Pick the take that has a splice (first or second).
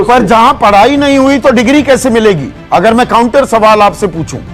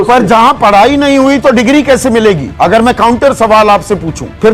second